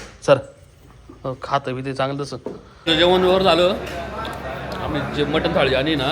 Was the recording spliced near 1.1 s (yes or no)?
no